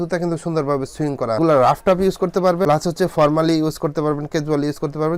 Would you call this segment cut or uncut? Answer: uncut